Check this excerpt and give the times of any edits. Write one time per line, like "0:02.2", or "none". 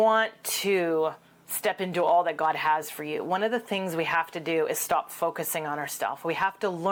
none